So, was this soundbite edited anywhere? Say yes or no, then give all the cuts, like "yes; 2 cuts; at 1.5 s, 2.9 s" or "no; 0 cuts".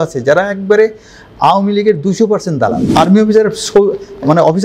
yes; 1 cut; at 2.8 s